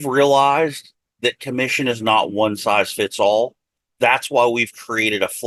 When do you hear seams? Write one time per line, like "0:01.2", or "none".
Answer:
none